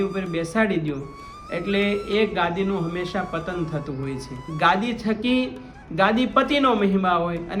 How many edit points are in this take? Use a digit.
1